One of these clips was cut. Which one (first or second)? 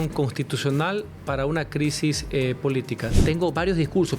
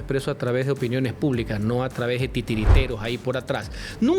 first